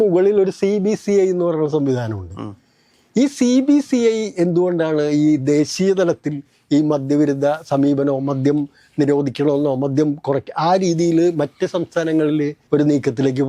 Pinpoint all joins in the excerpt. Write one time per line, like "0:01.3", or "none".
0:12.6

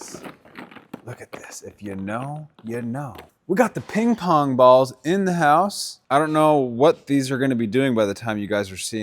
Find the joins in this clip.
0:03.3
0:05.9

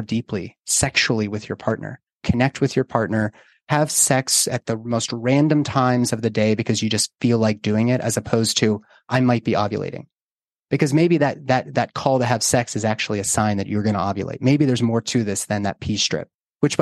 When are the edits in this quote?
0:02.2

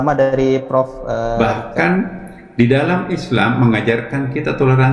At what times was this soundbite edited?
0:01.4

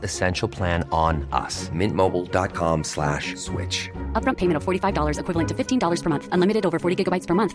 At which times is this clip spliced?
none

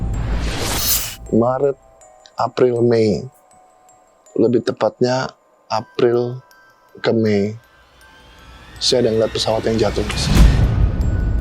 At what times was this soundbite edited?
0:01.1
0:10.1

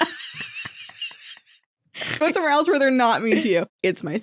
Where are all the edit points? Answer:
0:02.2

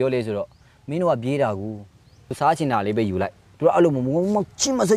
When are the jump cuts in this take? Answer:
0:02.3

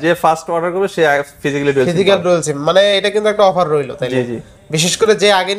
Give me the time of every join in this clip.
none

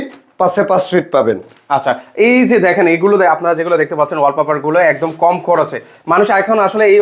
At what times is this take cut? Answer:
none

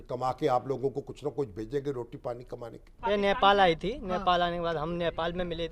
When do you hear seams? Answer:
0:02.9

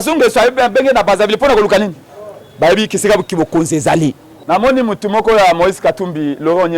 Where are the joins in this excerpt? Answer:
0:04.3

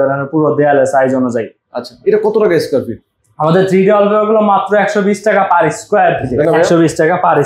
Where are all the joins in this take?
0:06.3

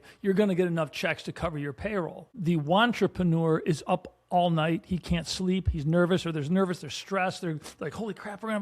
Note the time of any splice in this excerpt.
0:02.2

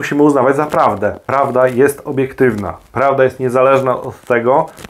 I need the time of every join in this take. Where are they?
0:01.2

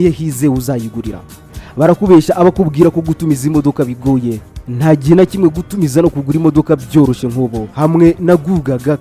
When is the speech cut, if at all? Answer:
none

